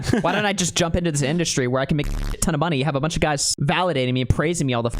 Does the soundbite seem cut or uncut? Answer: cut